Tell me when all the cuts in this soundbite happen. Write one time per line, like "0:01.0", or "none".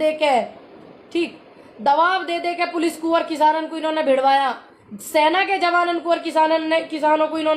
none